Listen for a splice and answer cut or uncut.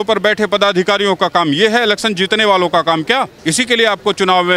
cut